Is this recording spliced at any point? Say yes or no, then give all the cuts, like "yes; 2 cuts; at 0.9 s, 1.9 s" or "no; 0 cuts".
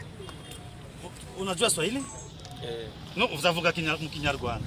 no; 0 cuts